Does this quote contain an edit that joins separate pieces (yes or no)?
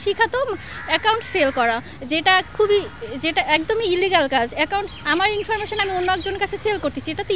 no